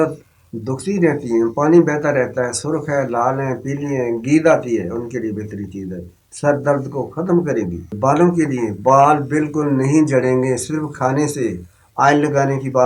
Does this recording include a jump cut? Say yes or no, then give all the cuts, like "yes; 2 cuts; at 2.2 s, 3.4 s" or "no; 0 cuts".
yes; 1 cut; at 7.9 s